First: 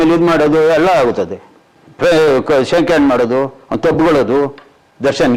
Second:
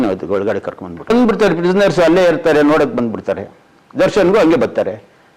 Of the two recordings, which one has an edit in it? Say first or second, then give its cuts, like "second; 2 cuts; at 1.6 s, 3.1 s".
second; 1 cut; at 1.1 s